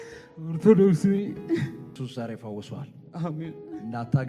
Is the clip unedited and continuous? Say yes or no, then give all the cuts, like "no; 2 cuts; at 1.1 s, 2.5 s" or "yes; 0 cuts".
no; 1 cut; at 1.9 s